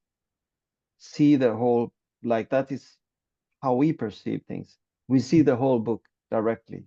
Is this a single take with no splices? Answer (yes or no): yes